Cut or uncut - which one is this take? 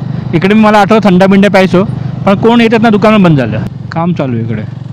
cut